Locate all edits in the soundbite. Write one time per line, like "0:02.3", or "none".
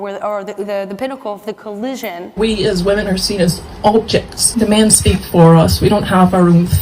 0:02.4
0:04.4